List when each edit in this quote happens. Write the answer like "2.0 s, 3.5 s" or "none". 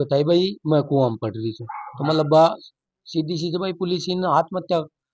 none